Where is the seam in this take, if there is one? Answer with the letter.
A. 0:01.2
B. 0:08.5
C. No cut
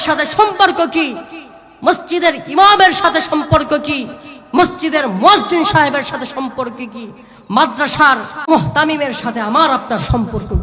B